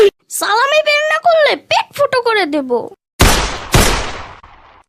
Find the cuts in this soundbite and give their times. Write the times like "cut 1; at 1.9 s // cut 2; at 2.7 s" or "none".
cut 1; at 3.0 s

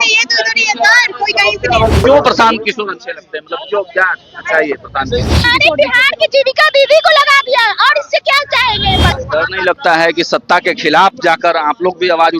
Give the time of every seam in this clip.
cut 1; at 2.0 s // cut 2; at 5.5 s // cut 3; at 9.1 s

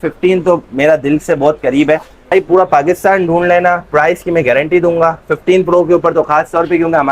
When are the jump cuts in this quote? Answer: cut 1; at 2.3 s

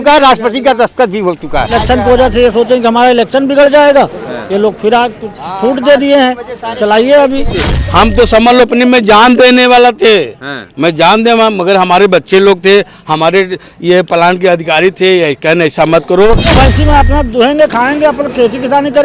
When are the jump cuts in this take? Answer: cut 1; at 1.7 s // cut 2; at 7.8 s // cut 3; at 16.5 s

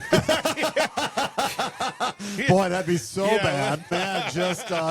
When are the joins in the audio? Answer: cut 1; at 3.9 s

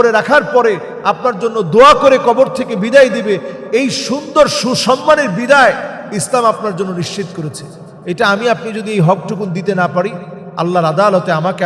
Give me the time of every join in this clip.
none

